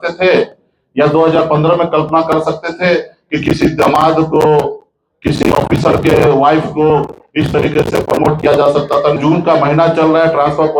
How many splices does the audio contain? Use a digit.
1